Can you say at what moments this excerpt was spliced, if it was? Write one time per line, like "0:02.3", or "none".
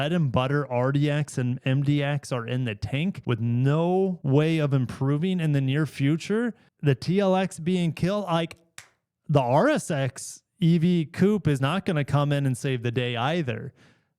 0:03.2
0:04.2